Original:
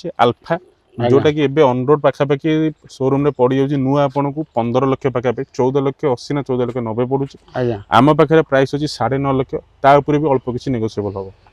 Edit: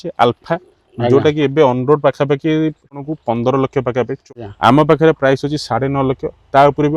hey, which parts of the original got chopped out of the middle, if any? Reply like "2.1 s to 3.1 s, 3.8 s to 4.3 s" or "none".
2.9 s to 4.2 s, 5.5 s to 7.5 s